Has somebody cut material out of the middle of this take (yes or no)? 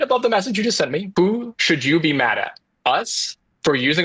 yes